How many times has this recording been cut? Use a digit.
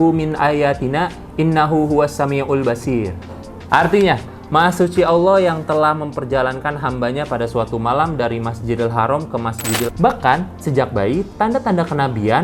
1